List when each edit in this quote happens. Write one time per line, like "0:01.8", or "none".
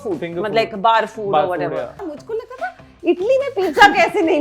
0:02.2